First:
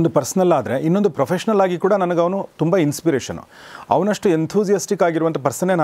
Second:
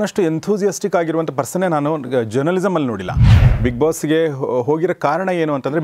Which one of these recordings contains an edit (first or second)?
second